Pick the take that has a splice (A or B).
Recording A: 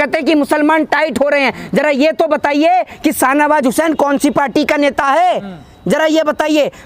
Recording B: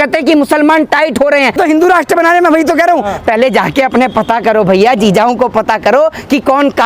B